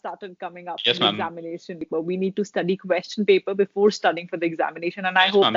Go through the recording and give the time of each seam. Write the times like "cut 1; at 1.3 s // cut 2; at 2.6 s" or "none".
cut 1; at 1.8 s